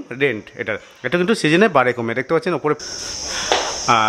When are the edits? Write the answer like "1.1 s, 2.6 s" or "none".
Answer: 2.8 s